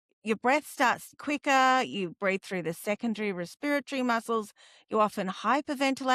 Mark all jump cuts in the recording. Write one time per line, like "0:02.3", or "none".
0:01.1